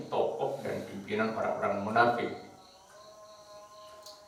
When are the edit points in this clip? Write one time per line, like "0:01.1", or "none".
none